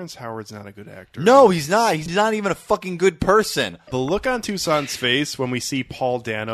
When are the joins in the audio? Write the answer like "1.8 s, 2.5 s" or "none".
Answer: 2.0 s, 3.8 s